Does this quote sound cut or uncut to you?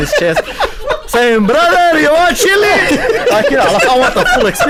uncut